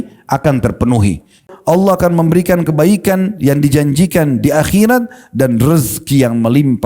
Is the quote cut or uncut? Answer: cut